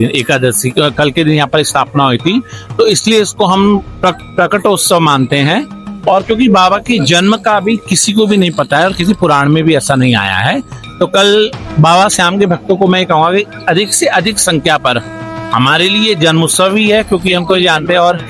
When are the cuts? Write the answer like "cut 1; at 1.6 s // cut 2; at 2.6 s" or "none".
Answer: none

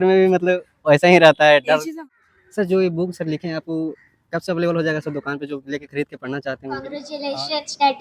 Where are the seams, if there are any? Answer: cut 1; at 1.9 s // cut 2; at 7.0 s

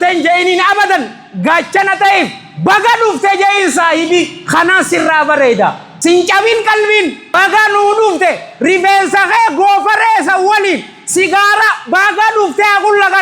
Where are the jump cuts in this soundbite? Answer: cut 1; at 5.9 s // cut 2; at 7.4 s

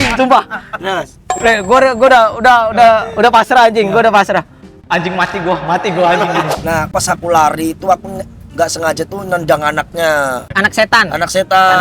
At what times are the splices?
cut 1; at 1.2 s // cut 2; at 6.8 s // cut 3; at 10.5 s

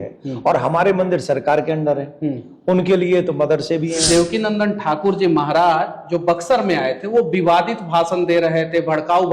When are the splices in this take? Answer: cut 1; at 4.0 s

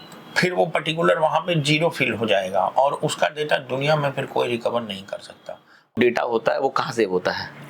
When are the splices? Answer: cut 1; at 5.9 s

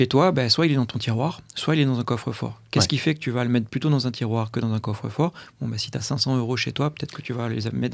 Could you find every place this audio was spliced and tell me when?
none

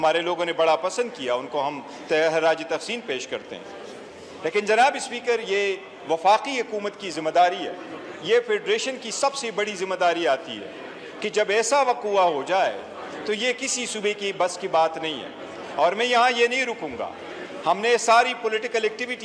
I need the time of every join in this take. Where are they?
none

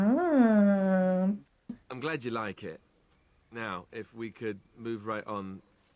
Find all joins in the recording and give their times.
cut 1; at 1.8 s

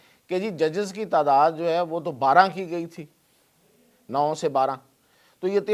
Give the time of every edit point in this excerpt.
none

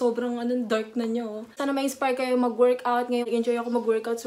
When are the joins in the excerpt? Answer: cut 1; at 1.6 s

